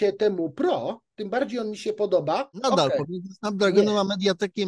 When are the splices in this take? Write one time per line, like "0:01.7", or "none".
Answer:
0:02.6